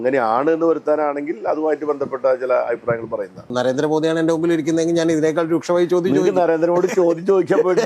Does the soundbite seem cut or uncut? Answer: cut